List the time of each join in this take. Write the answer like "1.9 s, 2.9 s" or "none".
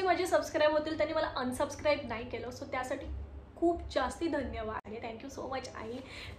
4.9 s